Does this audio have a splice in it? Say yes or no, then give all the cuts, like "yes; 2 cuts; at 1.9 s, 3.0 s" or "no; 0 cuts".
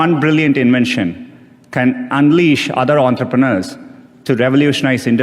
no; 0 cuts